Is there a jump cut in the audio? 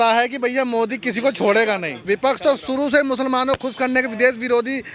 yes; 1 cut; at 2.0 s

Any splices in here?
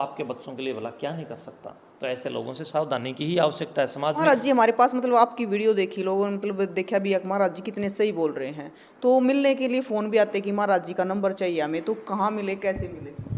no; 0 cuts

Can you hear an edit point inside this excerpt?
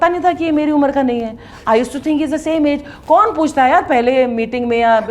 no; 0 cuts

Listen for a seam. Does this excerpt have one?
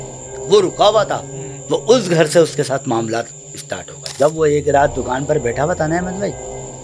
yes; 1 cut; at 4.0 s

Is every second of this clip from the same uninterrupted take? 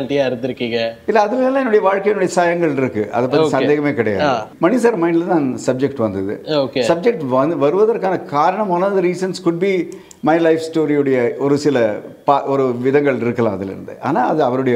no; 1 cut; at 4.5 s

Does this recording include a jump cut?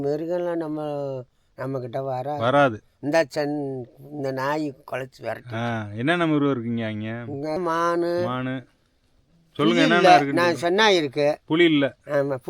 yes; 1 cut; at 7.6 s

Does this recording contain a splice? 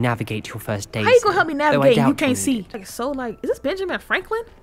yes; 1 cut; at 2.8 s

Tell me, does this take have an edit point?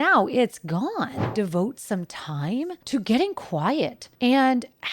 yes; 3 cuts; at 1.2 s, 2.8 s, 4.0 s

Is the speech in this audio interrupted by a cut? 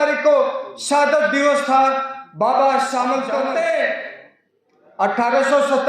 yes; 1 cut; at 3.4 s

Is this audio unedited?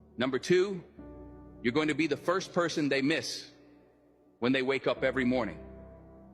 yes; 0 cuts

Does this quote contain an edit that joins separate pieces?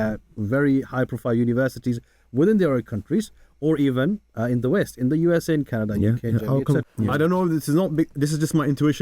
yes; 1 cut; at 6.9 s

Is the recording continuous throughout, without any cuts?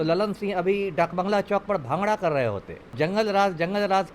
no; 1 cut; at 2.9 s

